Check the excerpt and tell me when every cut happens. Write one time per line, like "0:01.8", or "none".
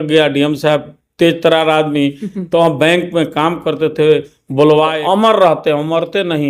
0:05.0